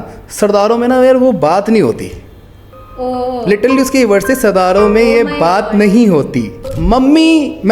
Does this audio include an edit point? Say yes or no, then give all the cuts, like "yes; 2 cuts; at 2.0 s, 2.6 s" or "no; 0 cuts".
yes; 1 cut; at 6.7 s